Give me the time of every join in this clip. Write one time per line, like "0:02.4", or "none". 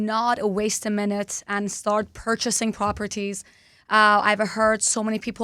none